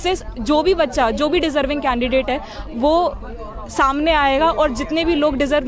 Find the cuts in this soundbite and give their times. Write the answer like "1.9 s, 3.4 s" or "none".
none